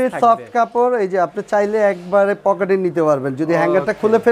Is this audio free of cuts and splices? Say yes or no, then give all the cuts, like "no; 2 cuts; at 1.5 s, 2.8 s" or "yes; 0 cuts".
yes; 0 cuts